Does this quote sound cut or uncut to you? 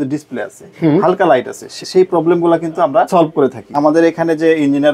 cut